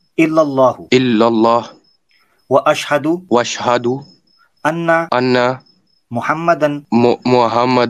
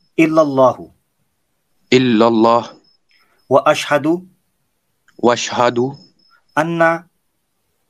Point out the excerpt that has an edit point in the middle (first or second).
first